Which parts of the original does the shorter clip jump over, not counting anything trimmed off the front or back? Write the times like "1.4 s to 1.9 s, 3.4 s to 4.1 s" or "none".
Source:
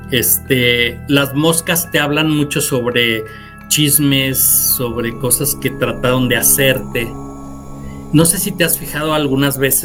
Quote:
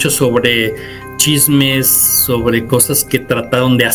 none